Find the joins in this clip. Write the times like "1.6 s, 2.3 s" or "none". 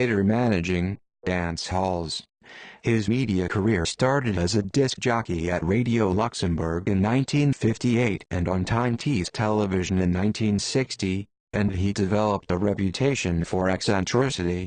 5.5 s